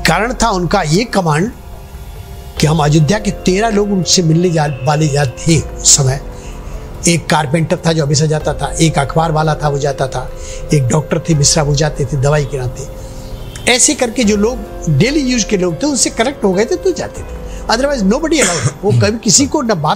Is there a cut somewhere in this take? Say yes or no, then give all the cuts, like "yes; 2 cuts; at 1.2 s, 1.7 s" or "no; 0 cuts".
no; 0 cuts